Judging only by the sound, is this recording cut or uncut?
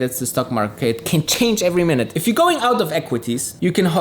cut